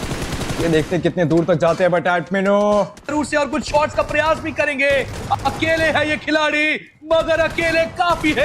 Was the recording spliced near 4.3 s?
no; 1 cut; at 3.1 s

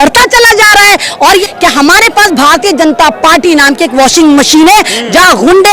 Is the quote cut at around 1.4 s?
yes; 1 cut; at 1.4 s

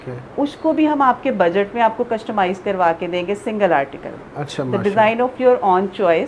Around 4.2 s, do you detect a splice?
no; 0 cuts

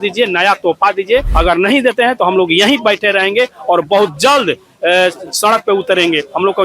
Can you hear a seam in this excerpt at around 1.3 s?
yes; 1 cut; at 1.3 s

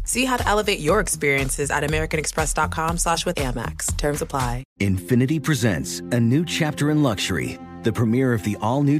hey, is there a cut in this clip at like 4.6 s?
yes; 1 cut; at 4.6 s

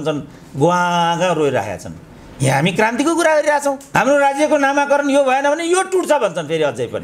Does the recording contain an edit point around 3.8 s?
yes; 1 cut; at 3.8 s

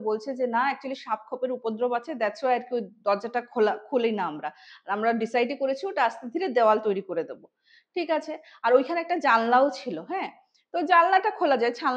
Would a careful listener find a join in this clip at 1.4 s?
no; 0 cuts

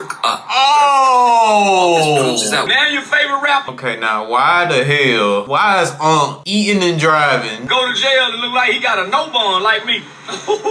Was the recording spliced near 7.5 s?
yes; 5 cuts; at 2.7 s, 3.7 s, 5.5 s, 6.4 s, 7.5 s

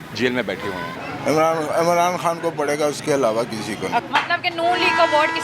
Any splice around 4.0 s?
yes; 2 cuts; at 1.0 s, 4.0 s

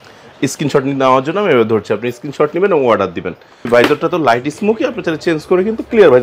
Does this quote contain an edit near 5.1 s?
no; 1 cut; at 3.7 s

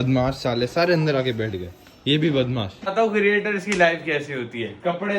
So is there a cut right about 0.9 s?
no; 1 cut; at 2.8 s

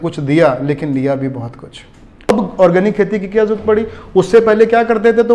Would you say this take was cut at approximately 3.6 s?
no; 1 cut; at 2.3 s

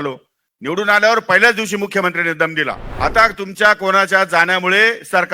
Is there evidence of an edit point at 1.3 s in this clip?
no; 1 cut; at 2.9 s

